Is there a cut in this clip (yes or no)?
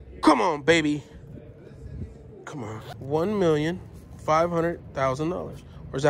yes